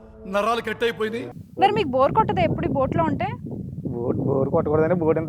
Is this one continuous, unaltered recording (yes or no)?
no